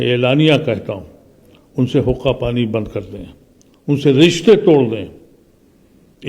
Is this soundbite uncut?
yes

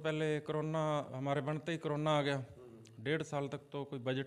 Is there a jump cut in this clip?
no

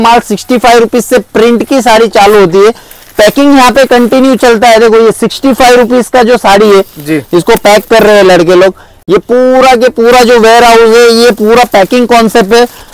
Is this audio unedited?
yes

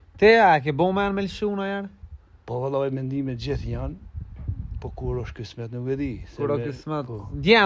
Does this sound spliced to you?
no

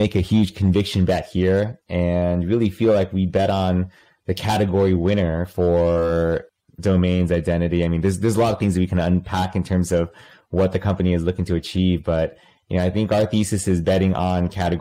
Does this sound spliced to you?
no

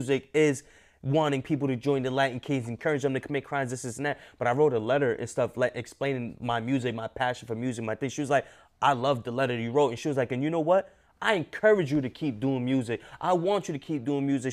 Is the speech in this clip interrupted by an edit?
no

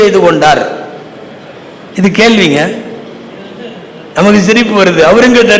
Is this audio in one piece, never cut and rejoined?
yes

